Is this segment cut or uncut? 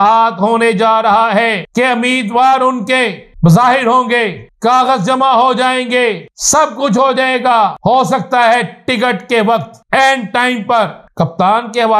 cut